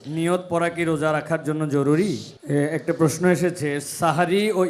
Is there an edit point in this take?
yes; 1 cut; at 2.3 s

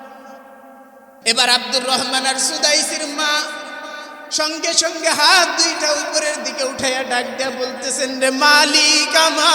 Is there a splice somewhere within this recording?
yes; 1 cut; at 1.2 s

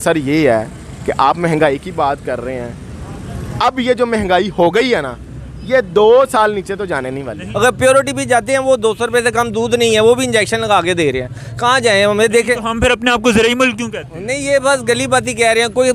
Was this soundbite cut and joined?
yes; 1 cut; at 7.4 s

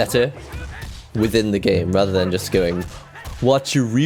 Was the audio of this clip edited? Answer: no; 0 cuts

